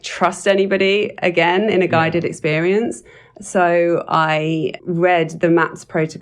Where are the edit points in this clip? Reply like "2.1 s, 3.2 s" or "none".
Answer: 4.8 s